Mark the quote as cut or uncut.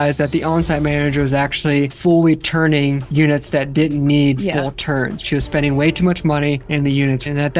uncut